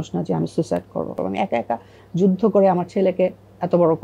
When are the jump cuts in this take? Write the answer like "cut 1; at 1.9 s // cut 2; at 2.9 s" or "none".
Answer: cut 1; at 1.1 s